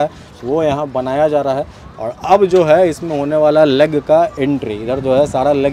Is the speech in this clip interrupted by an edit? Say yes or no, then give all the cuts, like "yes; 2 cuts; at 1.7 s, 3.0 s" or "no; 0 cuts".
no; 0 cuts